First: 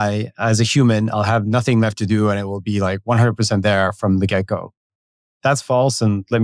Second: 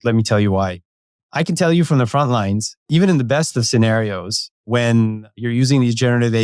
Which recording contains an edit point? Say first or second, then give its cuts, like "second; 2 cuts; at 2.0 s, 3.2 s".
second; 4 cuts; at 1.2 s, 2.9 s, 4.6 s, 5.4 s